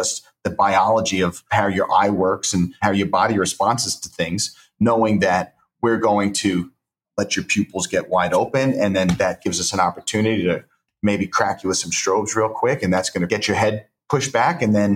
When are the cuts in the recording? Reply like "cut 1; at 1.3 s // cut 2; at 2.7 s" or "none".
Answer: cut 1; at 1.4 s // cut 2; at 2.8 s // cut 3; at 7.0 s // cut 4; at 13.3 s